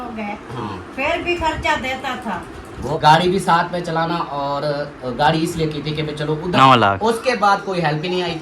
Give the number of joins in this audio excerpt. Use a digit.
2